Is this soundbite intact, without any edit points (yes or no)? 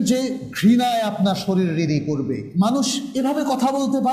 no